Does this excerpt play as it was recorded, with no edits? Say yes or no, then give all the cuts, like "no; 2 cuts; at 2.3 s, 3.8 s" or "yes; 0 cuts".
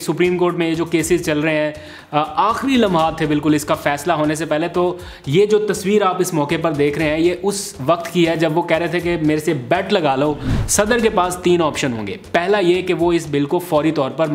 no; 1 cut; at 10.5 s